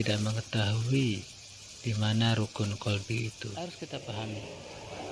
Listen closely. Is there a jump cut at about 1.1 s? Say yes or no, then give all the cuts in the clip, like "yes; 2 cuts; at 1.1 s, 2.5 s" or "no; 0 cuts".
no; 1 cut; at 3.6 s